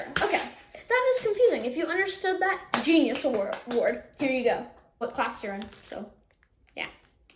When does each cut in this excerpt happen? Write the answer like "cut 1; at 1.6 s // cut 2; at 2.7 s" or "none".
cut 1; at 5.0 s